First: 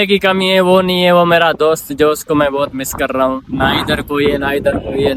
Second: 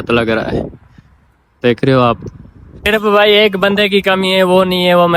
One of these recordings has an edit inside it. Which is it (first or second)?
second